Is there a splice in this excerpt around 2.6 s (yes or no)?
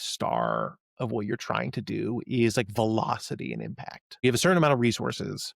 no